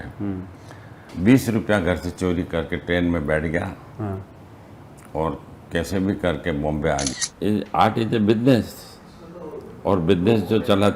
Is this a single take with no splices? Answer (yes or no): no